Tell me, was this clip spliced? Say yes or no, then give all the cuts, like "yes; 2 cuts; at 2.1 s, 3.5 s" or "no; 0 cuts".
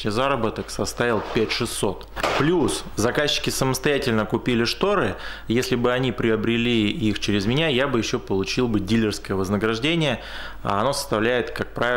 yes; 1 cut; at 2.1 s